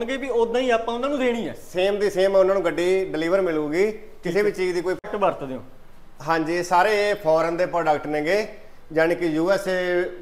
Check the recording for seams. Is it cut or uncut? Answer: cut